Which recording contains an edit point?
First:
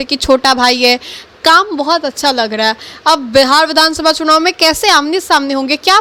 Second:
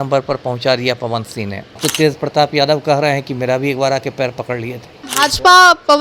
second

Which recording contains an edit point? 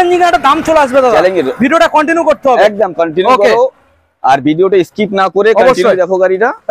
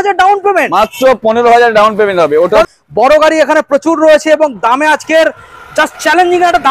second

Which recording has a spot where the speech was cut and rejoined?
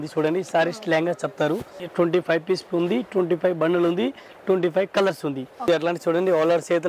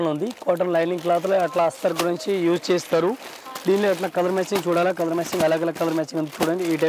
first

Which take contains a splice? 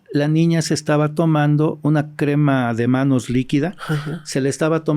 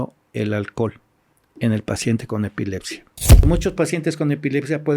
second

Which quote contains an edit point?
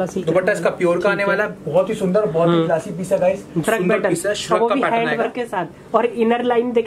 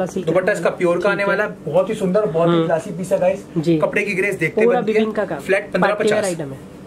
first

